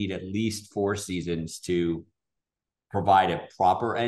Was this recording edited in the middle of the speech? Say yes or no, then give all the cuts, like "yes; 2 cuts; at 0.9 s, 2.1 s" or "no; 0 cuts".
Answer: no; 0 cuts